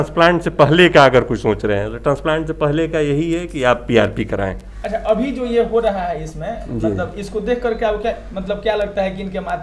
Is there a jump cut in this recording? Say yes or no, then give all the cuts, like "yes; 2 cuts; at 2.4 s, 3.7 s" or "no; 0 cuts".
no; 0 cuts